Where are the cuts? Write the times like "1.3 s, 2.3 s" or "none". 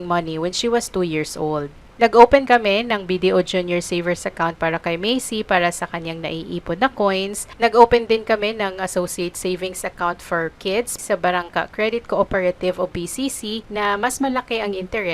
1.8 s, 2.4 s, 7.4 s, 10.9 s, 13.6 s